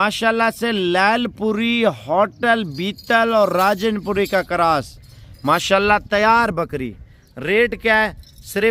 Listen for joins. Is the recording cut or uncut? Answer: uncut